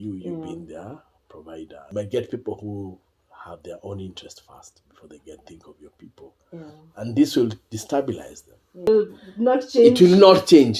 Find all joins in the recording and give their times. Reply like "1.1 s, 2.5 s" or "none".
1.8 s, 8.9 s